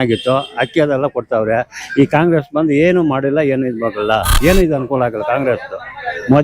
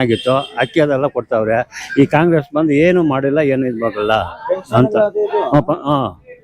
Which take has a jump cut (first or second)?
first